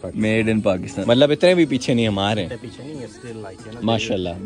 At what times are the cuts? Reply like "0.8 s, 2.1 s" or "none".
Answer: 0.9 s

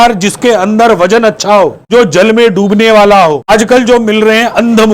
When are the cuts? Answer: 1.8 s, 3.5 s

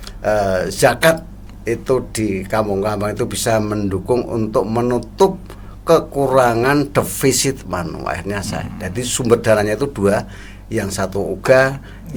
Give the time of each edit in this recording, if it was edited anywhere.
none

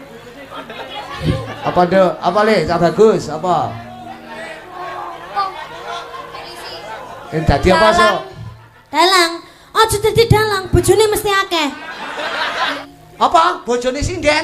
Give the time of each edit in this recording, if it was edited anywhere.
12.8 s

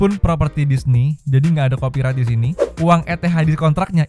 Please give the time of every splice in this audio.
2.6 s

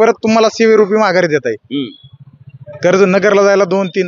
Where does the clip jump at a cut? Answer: none

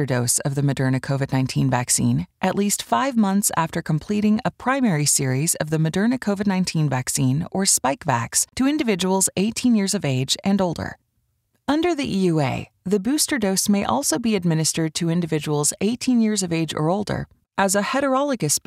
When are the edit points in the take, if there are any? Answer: 8.4 s

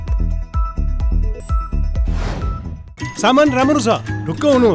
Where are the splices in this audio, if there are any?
2.7 s

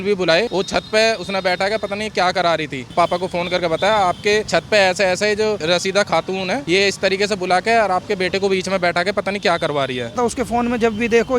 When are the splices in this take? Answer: 2.8 s, 10.2 s

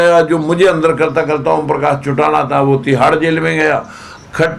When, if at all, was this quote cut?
none

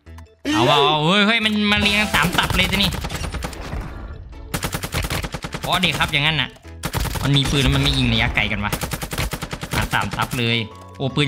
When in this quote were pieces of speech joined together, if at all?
6.8 s

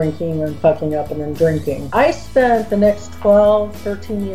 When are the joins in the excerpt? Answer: 1.8 s

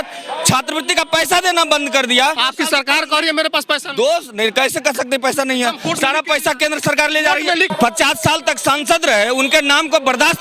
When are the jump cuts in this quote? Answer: 2.4 s, 7.7 s

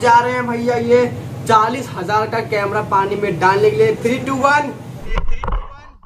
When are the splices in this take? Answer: 5.1 s

